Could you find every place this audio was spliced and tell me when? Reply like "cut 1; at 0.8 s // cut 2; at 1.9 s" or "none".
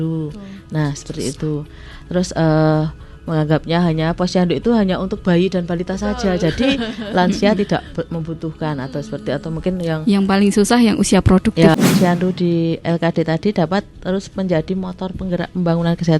cut 1; at 11.7 s